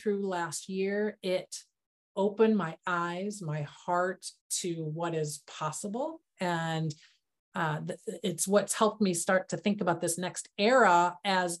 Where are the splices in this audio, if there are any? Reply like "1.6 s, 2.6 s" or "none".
none